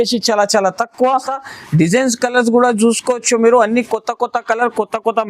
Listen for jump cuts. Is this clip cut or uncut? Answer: cut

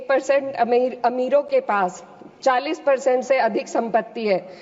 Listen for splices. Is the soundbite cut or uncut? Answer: uncut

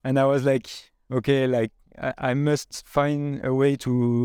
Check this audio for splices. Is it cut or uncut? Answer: uncut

